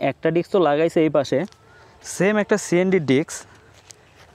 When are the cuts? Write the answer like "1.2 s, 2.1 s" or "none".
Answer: none